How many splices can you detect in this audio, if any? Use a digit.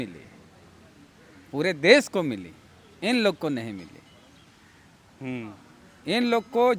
0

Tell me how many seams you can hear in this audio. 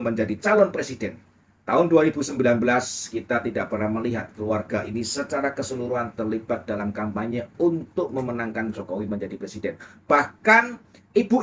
0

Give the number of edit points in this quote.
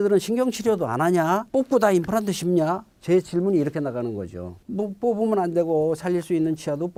0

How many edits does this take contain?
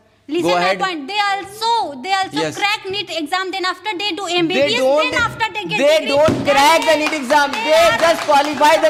0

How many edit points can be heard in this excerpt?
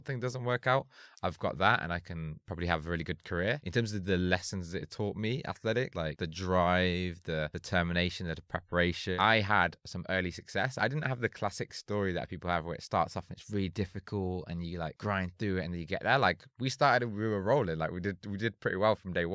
5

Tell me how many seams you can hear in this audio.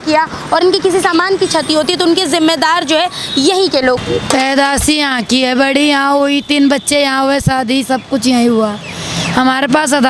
1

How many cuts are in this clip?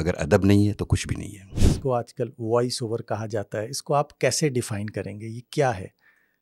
1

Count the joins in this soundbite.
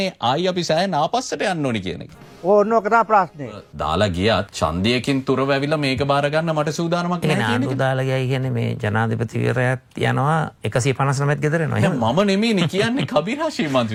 0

